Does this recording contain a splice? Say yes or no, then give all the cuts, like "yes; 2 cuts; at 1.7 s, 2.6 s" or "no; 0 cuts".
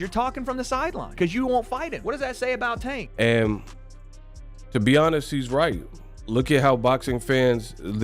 yes; 1 cut; at 3.0 s